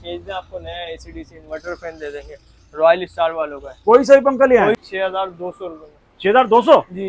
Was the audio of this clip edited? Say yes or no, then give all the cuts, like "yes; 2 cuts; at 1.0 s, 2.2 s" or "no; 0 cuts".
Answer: yes; 1 cut; at 4.8 s